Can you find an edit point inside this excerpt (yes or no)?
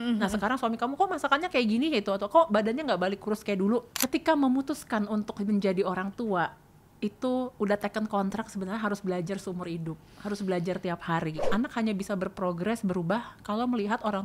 yes